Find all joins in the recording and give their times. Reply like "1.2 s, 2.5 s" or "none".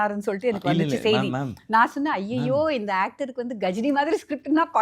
none